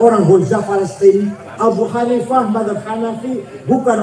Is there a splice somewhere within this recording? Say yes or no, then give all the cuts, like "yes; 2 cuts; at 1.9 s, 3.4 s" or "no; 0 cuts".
yes; 1 cut; at 1.4 s